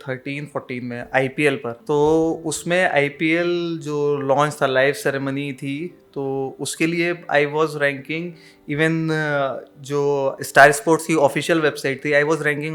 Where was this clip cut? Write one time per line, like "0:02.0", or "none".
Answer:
0:01.7